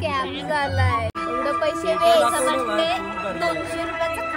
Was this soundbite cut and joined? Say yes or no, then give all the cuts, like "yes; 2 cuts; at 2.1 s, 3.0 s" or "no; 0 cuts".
yes; 1 cut; at 1.1 s